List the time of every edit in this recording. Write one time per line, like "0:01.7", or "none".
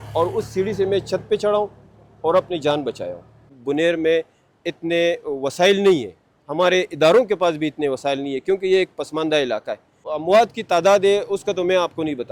0:03.5
0:10.0